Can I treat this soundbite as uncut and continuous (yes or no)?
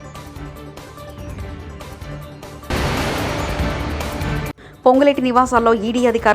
no